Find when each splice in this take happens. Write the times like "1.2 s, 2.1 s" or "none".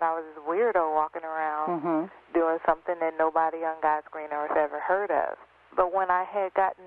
5.7 s